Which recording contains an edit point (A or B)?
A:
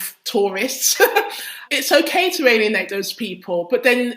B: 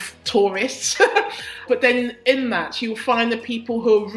B